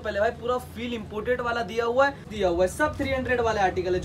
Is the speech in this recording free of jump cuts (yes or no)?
no